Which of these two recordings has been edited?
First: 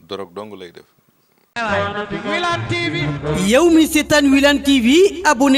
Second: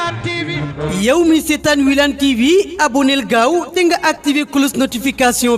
first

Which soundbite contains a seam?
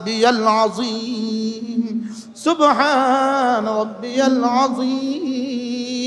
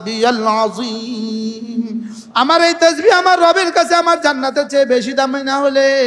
second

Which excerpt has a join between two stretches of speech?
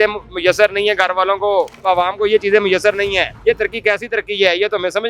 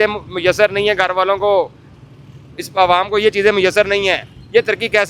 first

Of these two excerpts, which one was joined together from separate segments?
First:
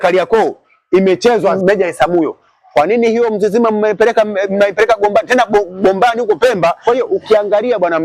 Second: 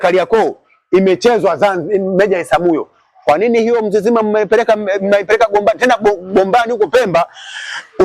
first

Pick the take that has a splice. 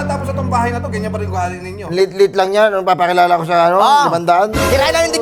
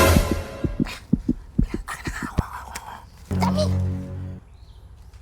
second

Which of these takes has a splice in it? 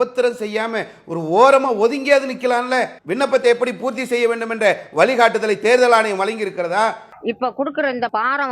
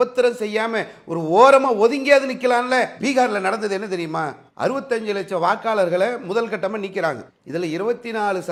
first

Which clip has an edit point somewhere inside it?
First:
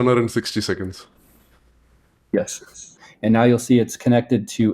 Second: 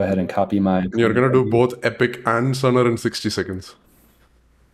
first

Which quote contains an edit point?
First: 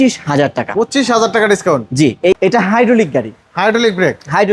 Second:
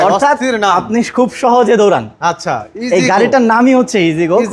first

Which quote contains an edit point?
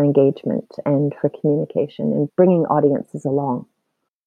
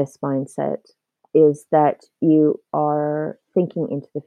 first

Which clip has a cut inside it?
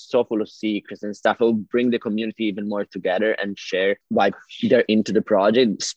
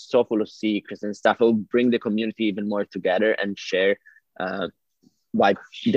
first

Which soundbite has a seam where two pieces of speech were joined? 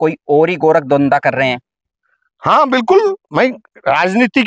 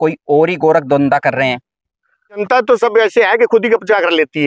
second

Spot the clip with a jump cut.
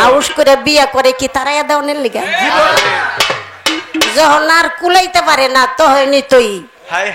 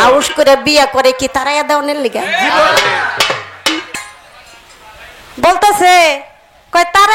second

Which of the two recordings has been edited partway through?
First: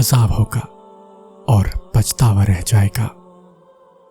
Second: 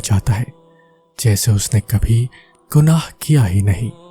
first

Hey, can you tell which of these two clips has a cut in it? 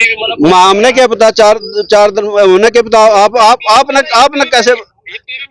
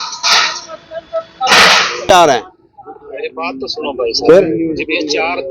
second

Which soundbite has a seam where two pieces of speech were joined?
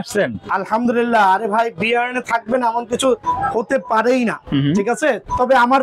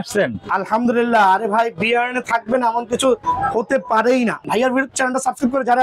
second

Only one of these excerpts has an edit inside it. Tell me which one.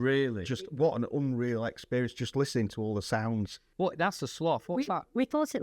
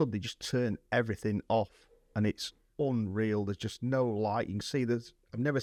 first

